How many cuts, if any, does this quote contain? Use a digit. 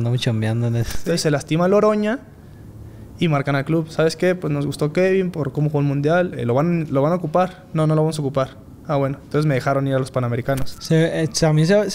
2